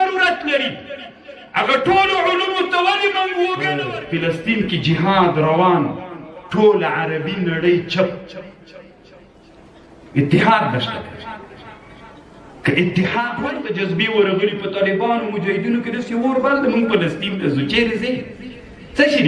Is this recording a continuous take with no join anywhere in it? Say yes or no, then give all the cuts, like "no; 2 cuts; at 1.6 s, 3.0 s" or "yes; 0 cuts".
no; 2 cuts; at 4.0 s, 13.4 s